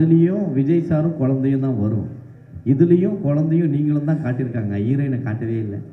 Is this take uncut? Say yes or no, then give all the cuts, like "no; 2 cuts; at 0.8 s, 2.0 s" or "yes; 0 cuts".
yes; 0 cuts